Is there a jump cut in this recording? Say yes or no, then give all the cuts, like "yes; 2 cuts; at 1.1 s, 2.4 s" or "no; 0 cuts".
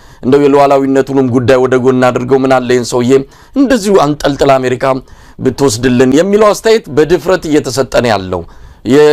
no; 0 cuts